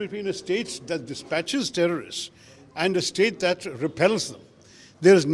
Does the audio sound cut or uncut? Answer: uncut